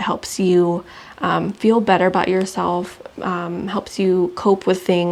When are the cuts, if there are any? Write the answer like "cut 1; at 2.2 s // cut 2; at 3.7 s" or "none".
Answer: none